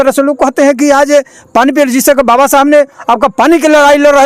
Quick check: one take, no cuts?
yes; 0 cuts

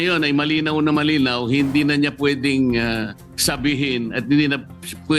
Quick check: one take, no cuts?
yes; 0 cuts

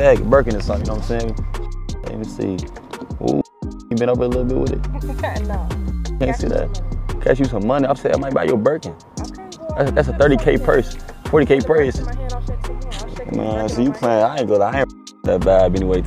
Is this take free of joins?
yes; 0 cuts

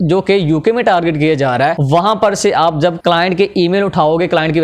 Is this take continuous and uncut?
no; 2 cuts; at 1.8 s, 3.0 s

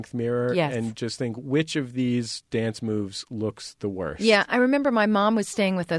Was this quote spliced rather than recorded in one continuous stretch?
no; 0 cuts

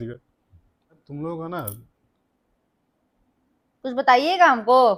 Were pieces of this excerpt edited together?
yes; 1 cut; at 1.0 s

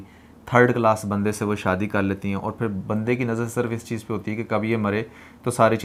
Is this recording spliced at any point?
no; 0 cuts

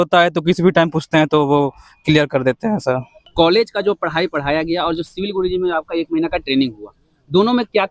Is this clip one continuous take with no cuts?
no; 1 cut; at 3.2 s

